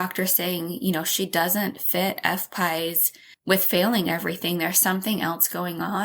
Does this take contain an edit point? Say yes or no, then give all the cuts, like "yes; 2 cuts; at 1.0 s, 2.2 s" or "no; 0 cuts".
no; 0 cuts